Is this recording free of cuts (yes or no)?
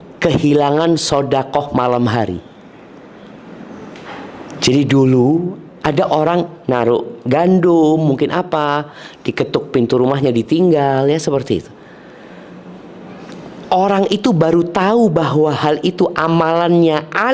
yes